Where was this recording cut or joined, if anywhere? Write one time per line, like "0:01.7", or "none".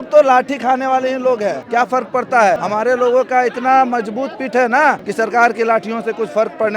0:01.6
0:02.6
0:05.0